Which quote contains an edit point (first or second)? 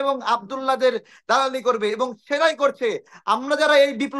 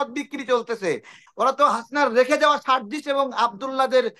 second